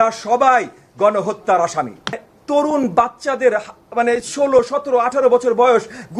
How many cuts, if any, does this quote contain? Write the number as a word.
one